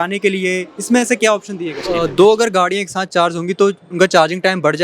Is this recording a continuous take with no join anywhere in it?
no; 1 cut; at 1.9 s

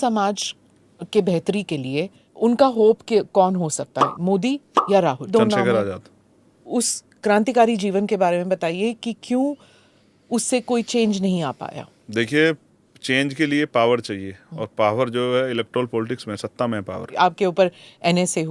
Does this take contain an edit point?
yes; 4 cuts; at 2.2 s, 5.3 s, 6.7 s, 17.1 s

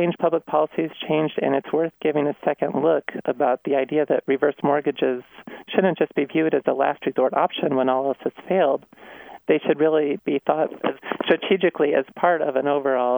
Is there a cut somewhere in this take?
no; 0 cuts

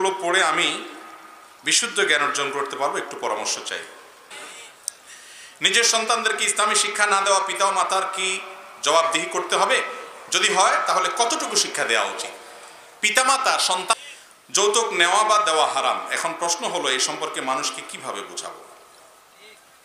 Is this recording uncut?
no; 2 cuts; at 4.3 s, 13.9 s

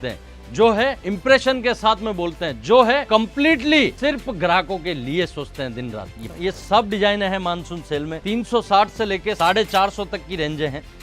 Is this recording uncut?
no; 6 cuts; at 1.1 s, 3.0 s, 4.0 s, 6.3 s, 8.1 s, 9.4 s

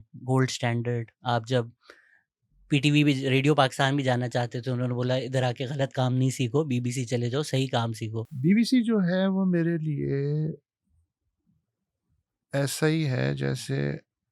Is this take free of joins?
no; 1 cut; at 8.3 s

